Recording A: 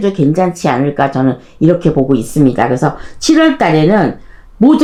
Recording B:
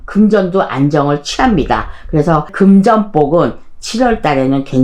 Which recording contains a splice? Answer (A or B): B